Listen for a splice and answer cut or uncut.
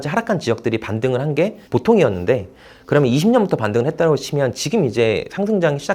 cut